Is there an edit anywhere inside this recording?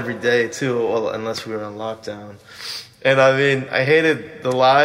yes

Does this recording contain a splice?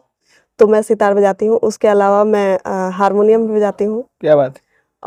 no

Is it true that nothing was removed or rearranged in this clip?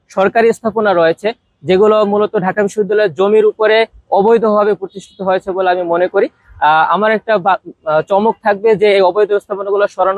yes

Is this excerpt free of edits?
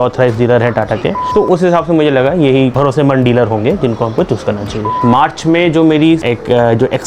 no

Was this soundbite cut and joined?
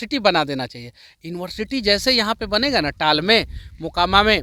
no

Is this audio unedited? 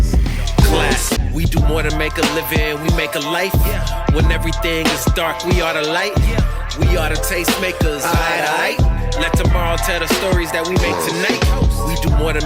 yes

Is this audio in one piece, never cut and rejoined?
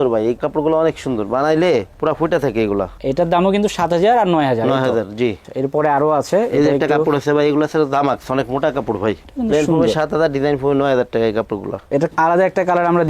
yes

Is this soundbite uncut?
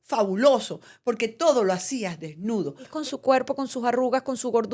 no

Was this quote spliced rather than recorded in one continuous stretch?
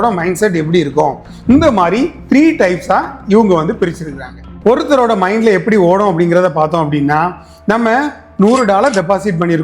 yes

